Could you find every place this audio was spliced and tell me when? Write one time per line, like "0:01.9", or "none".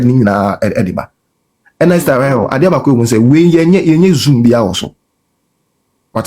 none